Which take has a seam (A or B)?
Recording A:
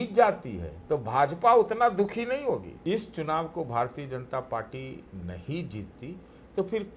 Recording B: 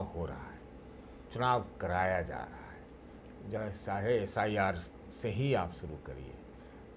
A